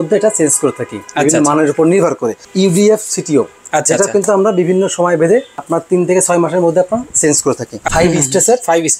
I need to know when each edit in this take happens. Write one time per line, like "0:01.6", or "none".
0:02.4
0:05.6
0:07.8